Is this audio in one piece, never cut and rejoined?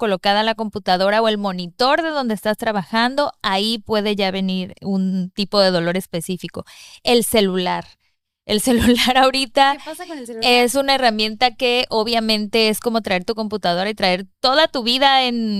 yes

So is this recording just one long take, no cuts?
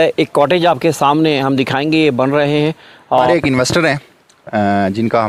yes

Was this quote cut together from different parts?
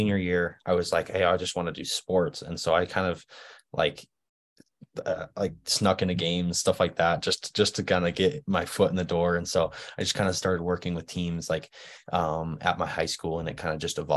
no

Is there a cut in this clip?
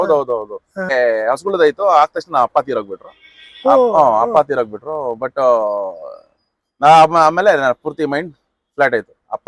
yes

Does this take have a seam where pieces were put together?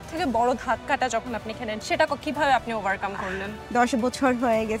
yes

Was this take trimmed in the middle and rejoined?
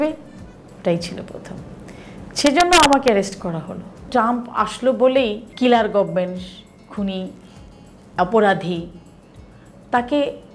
yes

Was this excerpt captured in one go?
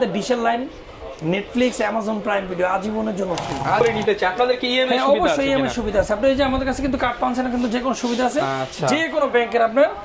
no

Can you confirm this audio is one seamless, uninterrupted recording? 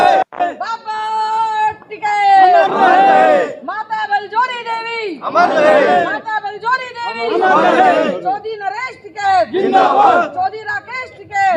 yes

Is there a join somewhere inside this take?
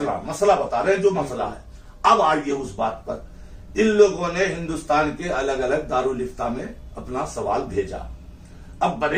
no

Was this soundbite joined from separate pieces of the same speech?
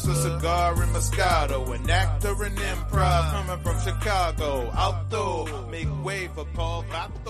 no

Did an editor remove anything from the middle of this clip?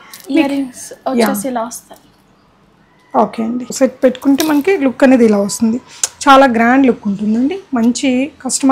yes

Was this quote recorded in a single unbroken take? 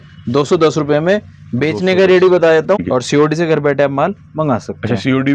no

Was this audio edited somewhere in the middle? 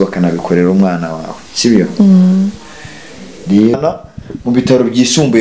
yes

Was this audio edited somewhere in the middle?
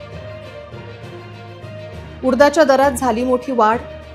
no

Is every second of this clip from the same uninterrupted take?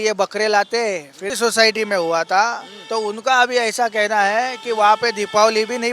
no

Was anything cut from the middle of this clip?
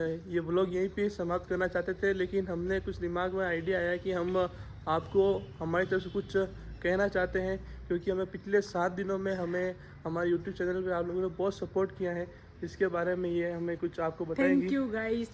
no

